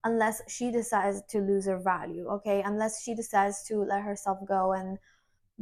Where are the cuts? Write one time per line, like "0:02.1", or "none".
none